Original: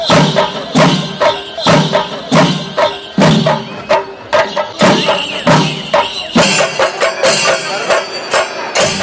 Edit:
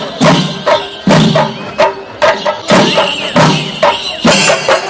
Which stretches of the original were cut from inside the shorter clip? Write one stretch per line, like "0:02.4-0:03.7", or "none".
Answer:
0:01.4-0:03.0